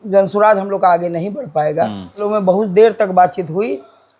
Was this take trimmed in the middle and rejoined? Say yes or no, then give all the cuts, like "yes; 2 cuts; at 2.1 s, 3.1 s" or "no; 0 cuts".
yes; 1 cut; at 2.2 s